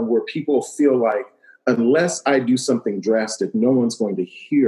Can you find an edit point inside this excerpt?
no; 0 cuts

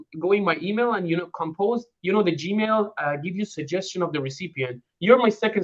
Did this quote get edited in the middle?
no; 0 cuts

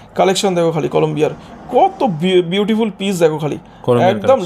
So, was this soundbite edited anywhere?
no; 0 cuts

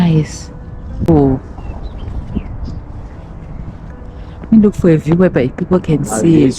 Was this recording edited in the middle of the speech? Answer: yes; 1 cut; at 1.1 s

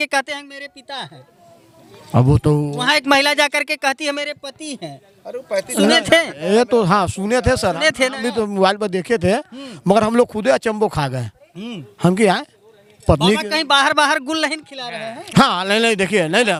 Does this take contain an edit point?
no; 0 cuts

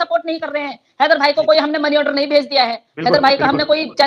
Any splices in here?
no; 0 cuts

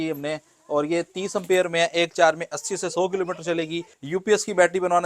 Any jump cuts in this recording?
yes; 1 cut; at 3.9 s

